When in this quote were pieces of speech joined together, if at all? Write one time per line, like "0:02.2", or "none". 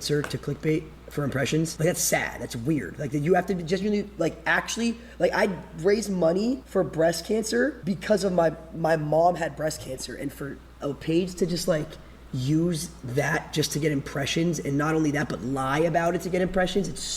0:01.7
0:06.6
0:07.8